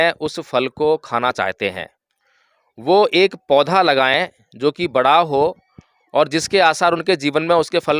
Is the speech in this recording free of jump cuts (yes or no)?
yes